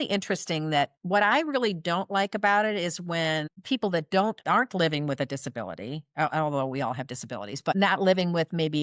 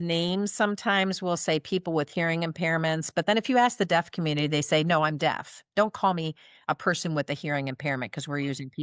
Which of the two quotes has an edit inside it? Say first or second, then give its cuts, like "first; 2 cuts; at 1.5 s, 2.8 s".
first; 4 cuts; at 1.0 s, 3.5 s, 4.4 s, 7.7 s